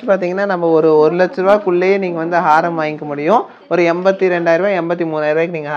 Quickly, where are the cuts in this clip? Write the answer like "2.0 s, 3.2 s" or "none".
none